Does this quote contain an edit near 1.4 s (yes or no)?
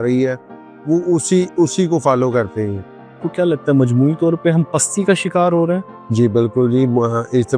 no